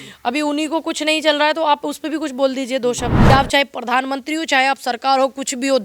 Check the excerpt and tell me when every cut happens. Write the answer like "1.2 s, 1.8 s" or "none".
3.3 s